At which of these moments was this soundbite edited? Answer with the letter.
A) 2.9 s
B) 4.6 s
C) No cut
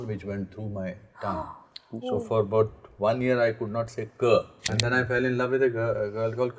B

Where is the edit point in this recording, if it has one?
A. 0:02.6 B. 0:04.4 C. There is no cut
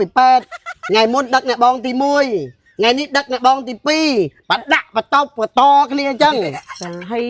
C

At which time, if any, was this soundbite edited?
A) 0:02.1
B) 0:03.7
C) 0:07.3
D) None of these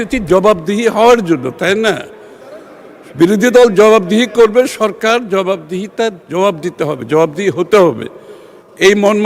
D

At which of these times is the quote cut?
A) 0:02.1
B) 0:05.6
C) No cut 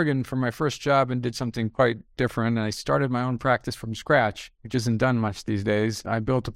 C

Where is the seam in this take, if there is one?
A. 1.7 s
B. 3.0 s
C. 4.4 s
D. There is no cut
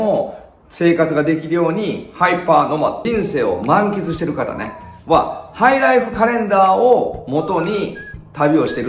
B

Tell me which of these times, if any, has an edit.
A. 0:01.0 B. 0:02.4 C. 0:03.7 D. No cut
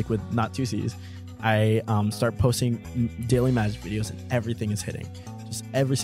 D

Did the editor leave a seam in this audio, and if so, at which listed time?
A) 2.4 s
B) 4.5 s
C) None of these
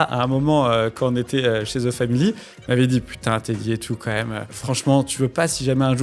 B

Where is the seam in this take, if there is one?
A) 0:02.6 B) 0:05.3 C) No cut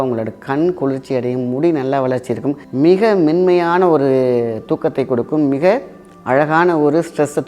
A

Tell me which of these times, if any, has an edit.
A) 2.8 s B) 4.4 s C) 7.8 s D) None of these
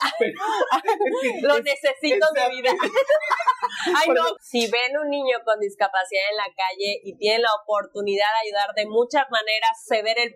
B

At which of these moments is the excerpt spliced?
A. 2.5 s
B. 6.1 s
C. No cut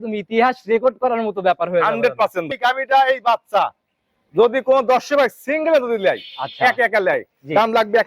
A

